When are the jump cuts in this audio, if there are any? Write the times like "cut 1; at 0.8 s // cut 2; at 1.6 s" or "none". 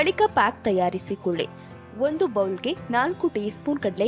cut 1; at 1.6 s